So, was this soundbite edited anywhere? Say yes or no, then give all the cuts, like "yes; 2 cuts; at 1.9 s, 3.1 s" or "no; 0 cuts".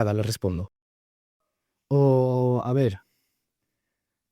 yes; 1 cut; at 1.3 s